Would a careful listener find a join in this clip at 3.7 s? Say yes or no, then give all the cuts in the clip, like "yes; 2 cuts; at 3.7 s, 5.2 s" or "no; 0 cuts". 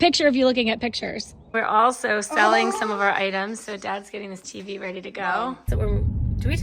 no; 2 cuts; at 1.5 s, 5.7 s